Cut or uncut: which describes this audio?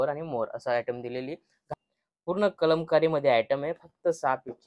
cut